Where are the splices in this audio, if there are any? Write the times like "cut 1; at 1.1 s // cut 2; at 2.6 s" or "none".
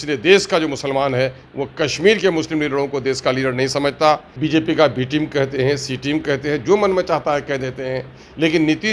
cut 1; at 4.3 s